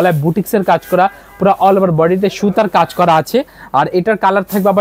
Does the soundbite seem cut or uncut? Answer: uncut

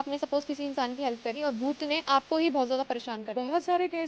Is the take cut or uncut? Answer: uncut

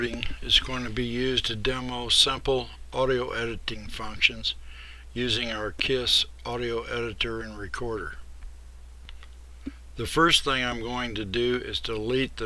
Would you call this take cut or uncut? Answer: cut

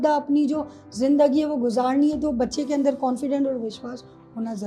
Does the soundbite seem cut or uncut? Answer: uncut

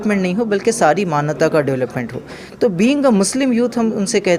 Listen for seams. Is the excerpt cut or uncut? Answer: uncut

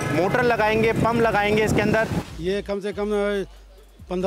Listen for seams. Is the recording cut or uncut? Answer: cut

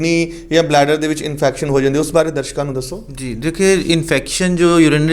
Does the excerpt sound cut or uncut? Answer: uncut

